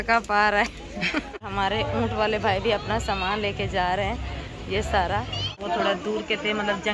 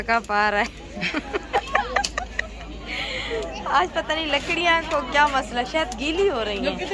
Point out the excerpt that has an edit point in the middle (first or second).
first